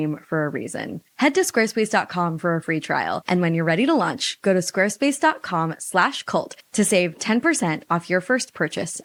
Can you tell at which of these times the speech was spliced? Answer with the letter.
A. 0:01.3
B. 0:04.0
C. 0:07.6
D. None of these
D